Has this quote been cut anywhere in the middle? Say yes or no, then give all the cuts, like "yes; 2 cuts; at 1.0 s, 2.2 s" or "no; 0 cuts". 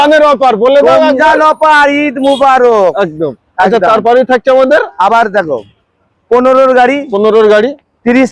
no; 0 cuts